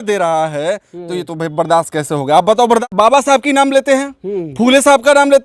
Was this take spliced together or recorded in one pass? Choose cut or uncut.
cut